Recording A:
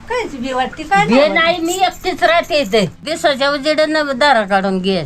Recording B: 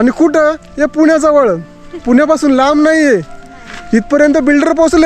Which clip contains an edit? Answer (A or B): A